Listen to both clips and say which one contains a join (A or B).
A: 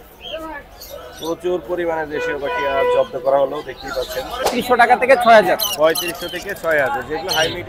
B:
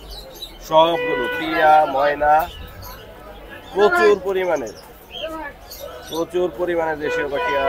A